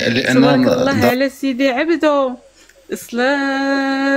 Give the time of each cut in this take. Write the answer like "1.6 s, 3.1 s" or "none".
0.9 s